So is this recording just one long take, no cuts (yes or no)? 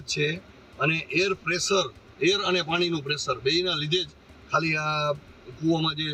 yes